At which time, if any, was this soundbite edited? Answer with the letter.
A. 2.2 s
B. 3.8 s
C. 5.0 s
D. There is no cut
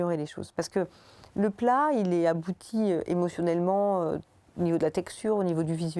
D